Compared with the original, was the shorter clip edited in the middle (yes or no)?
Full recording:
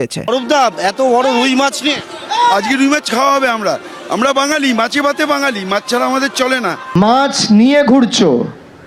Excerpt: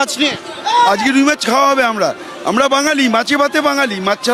no